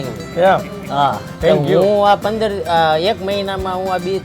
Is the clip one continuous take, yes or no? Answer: no